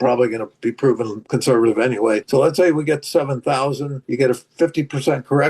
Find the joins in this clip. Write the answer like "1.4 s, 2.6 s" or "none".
1.2 s, 2.2 s, 3.9 s